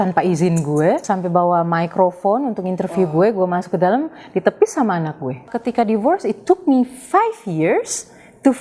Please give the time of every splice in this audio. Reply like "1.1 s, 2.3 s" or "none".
1.0 s, 5.5 s